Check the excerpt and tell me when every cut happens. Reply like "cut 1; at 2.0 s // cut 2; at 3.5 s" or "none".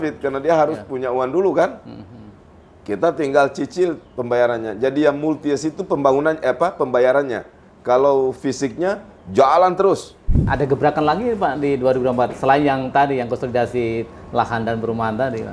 cut 1; at 10.4 s